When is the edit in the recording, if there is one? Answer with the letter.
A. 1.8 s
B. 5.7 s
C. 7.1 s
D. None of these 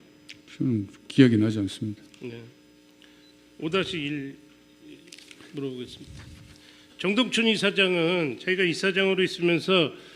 B